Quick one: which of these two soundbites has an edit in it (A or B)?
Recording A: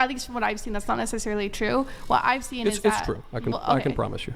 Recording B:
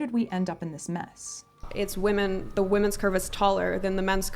B